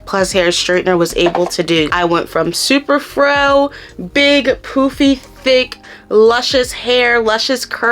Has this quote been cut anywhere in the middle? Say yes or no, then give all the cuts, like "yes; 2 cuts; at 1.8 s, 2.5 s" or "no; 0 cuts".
yes; 1 cut; at 1.9 s